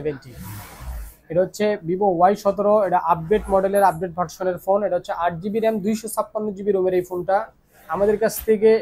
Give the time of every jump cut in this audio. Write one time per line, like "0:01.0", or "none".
none